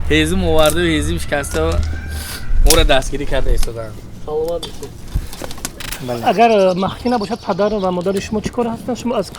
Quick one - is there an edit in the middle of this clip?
yes; 1 cut; at 5.9 s

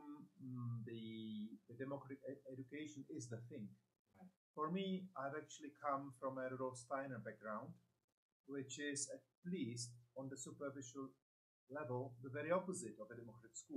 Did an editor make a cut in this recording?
no; 0 cuts

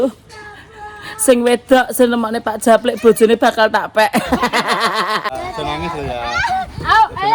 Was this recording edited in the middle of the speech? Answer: yes; 1 cut; at 5.3 s

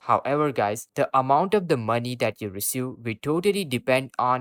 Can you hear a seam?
no; 0 cuts

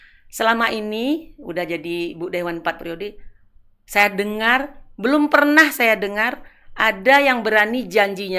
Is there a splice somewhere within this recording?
no; 0 cuts

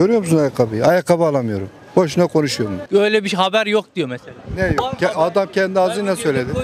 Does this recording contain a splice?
no; 0 cuts

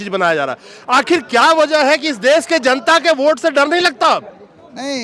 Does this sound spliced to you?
no; 0 cuts

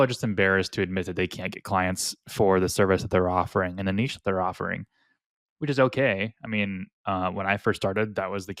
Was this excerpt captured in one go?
yes; 0 cuts

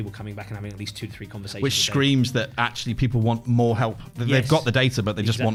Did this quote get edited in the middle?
no; 0 cuts

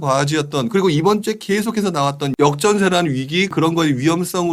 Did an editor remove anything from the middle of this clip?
yes; 2 cuts; at 2.2 s, 3.5 s

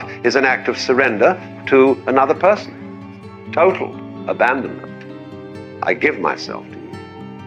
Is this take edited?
no; 0 cuts

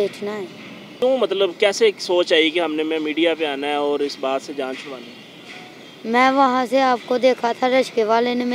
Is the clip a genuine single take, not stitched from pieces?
no; 1 cut; at 1.0 s

